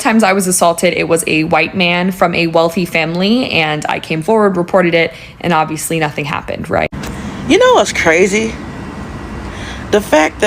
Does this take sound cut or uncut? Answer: cut